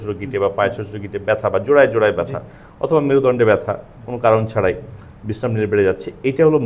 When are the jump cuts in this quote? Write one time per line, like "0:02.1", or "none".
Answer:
none

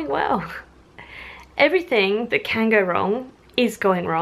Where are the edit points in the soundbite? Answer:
none

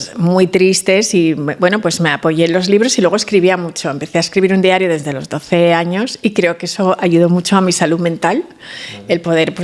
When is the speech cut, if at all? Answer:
none

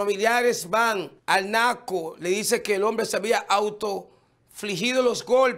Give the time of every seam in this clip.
0:01.1

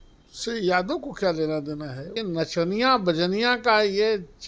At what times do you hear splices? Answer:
0:02.1

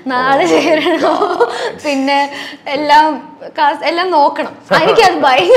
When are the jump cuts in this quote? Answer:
0:04.6

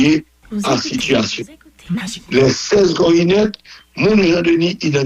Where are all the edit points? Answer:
none

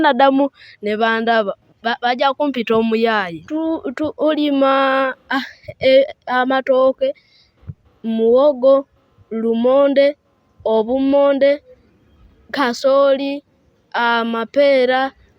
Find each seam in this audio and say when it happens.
0:03.4

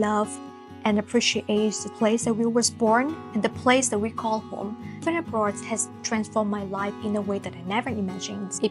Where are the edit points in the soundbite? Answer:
0:04.9

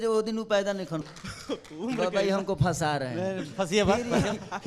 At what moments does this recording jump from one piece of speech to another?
0:01.0

